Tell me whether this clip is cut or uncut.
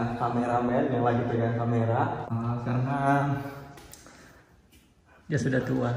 cut